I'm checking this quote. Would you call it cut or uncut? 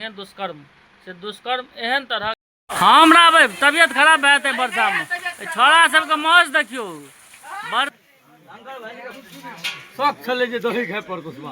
cut